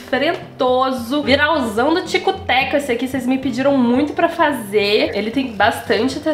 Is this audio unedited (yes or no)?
no